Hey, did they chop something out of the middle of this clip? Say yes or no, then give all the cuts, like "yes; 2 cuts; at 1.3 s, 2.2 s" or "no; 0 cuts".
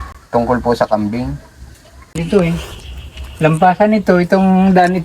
yes; 1 cut; at 2.2 s